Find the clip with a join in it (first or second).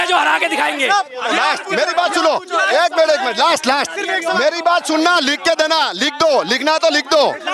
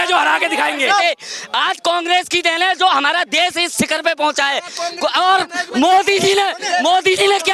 second